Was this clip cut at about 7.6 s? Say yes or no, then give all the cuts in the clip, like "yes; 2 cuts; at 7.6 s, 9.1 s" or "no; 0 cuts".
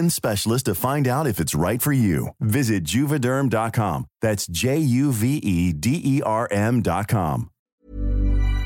yes; 1 cut; at 7.6 s